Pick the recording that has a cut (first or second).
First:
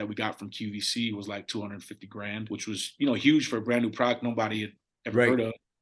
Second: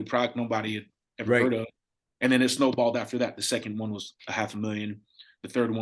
first